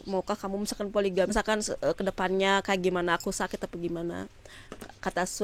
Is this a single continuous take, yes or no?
no